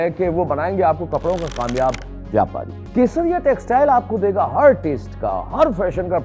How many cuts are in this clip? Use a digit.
1